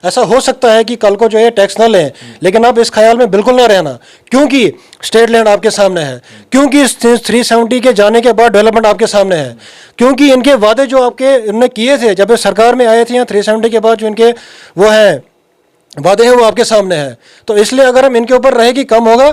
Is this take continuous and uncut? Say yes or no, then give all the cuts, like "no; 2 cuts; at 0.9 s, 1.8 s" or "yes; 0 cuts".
yes; 0 cuts